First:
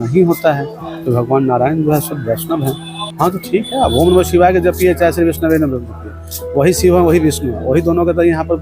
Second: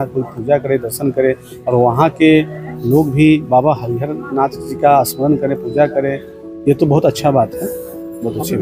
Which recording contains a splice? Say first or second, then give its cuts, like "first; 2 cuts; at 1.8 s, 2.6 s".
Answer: first; 1 cut; at 3.0 s